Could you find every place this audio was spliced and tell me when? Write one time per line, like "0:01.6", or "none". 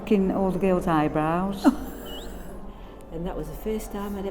0:02.7